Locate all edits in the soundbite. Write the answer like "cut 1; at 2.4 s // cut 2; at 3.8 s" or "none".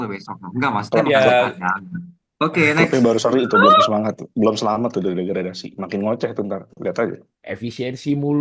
cut 1; at 7.3 s